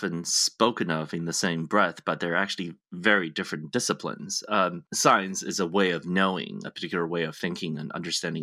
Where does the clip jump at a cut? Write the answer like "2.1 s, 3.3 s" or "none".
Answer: 4.9 s